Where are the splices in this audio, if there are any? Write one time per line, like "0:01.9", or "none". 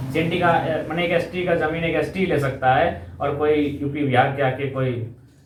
none